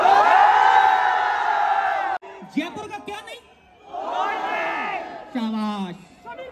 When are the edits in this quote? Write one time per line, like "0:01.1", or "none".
0:02.2